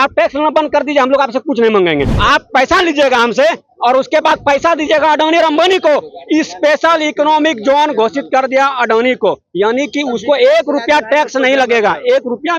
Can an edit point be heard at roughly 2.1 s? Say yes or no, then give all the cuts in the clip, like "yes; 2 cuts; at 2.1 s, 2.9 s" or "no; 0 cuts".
yes; 1 cut; at 2.1 s